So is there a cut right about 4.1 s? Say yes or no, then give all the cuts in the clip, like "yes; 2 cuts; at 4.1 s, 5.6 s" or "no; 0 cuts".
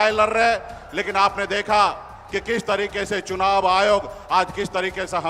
no; 0 cuts